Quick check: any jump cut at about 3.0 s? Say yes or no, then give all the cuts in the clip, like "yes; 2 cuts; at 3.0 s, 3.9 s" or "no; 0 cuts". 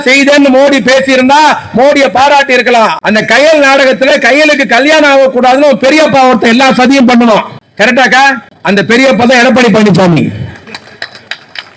yes; 2 cuts; at 3.0 s, 8.5 s